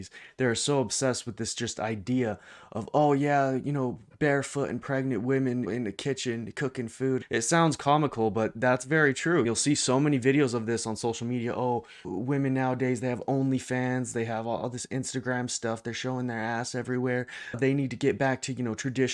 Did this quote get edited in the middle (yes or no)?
yes